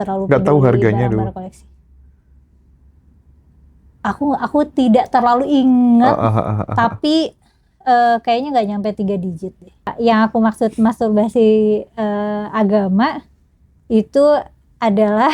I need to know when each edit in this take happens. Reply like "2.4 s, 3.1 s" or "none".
9.9 s

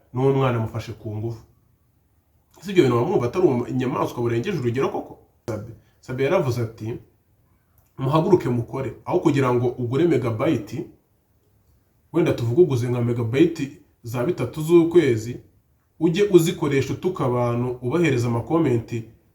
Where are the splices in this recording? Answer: 5.4 s

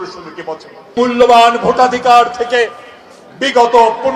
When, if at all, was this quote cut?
0.9 s

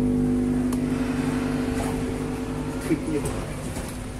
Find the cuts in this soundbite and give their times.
none

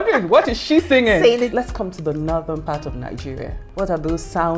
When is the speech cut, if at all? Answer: 1.5 s, 3.6 s

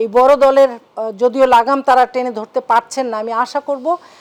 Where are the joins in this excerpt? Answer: none

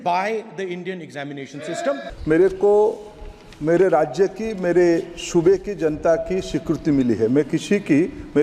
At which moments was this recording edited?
2.1 s

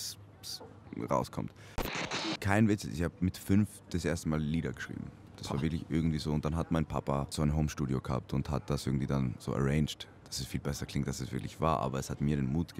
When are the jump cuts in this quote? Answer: 1.9 s, 7.3 s

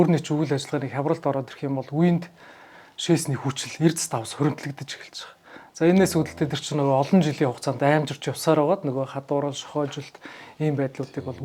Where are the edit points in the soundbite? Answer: none

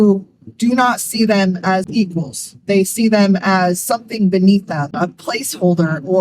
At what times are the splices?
1.9 s

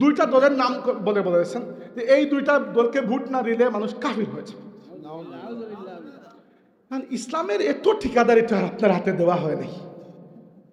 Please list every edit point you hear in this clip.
none

